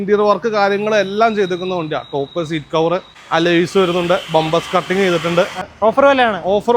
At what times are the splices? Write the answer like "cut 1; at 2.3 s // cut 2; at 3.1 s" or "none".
cut 1; at 3.1 s // cut 2; at 5.7 s